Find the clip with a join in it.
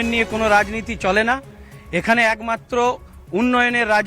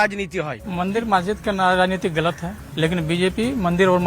second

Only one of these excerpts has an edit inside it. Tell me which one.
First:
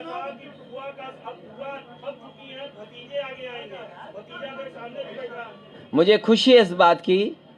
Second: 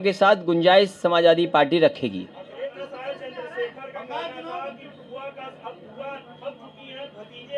second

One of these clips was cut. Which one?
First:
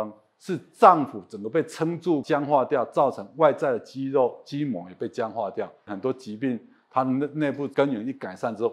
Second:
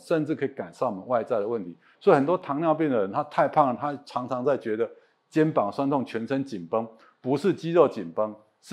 first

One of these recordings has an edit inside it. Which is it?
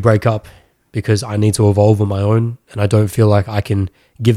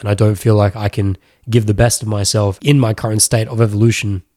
second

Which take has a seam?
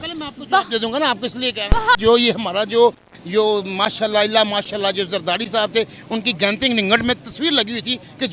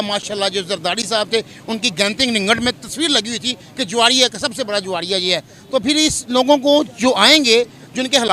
first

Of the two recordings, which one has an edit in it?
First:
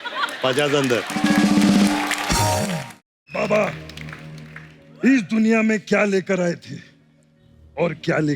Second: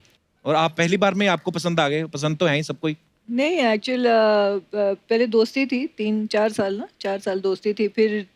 first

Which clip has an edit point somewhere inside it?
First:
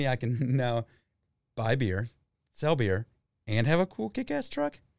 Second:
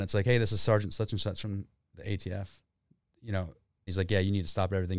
second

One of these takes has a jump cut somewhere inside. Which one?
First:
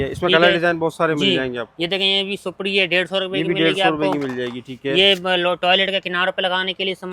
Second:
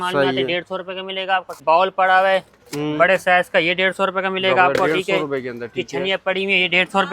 second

